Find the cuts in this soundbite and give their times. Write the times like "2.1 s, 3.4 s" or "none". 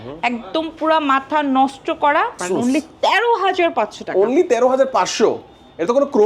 2.4 s